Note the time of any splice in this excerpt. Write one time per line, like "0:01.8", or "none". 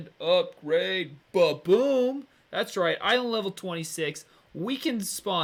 none